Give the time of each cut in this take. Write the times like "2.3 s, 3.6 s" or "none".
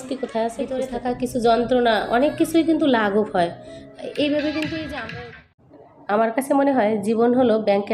0.9 s, 5.0 s